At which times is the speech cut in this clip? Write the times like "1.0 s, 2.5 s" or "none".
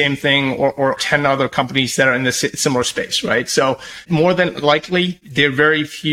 1.0 s, 4.0 s, 5.2 s

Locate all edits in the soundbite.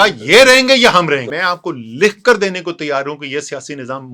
1.3 s

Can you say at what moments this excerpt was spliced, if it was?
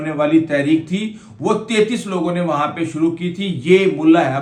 none

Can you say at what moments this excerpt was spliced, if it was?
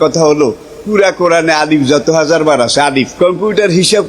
3.1 s

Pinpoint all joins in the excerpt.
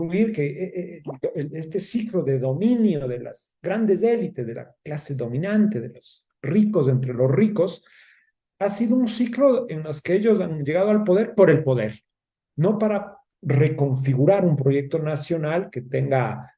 none

